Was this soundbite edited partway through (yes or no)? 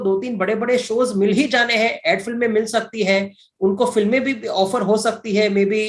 no